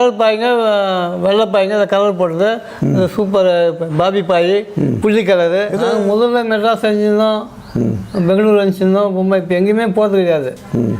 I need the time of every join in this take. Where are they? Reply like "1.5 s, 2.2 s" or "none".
5.8 s

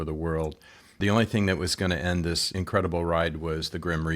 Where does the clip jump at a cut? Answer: 1.0 s, 2.5 s

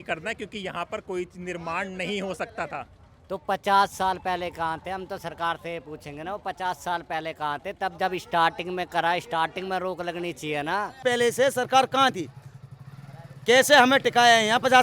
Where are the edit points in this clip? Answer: 11.0 s

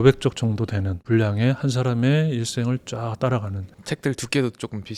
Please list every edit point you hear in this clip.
none

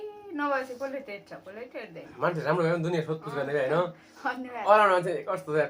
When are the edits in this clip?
2.1 s

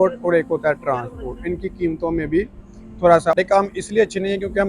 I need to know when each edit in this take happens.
3.4 s

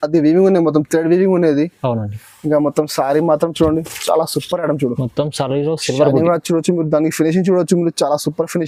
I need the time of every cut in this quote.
none

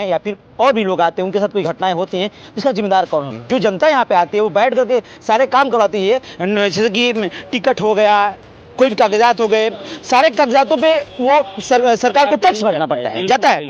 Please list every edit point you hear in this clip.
3.4 s

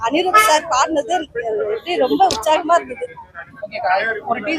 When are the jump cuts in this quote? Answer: none

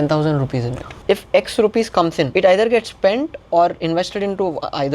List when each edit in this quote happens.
1.0 s, 2.3 s

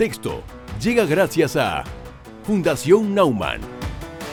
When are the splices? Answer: none

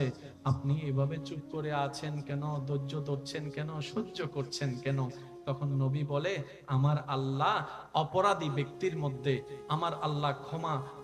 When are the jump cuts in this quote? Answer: 7.8 s

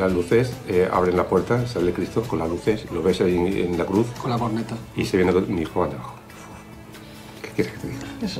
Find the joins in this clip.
none

